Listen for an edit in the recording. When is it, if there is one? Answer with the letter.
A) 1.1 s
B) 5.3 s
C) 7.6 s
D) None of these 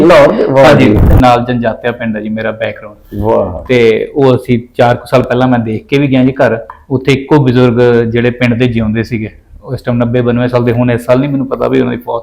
A